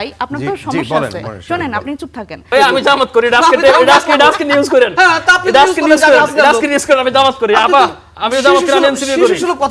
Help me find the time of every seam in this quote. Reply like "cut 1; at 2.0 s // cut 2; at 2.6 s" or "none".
cut 1; at 2.5 s